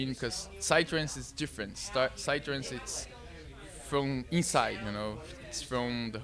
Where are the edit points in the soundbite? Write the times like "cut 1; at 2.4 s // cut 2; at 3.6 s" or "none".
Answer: none